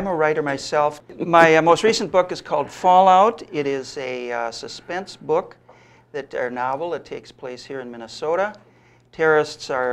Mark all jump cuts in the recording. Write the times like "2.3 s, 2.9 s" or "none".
1.1 s